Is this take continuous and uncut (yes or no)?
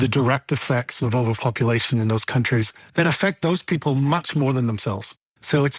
yes